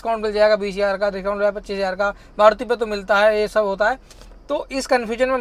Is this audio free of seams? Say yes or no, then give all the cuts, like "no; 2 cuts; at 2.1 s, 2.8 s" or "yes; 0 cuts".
yes; 0 cuts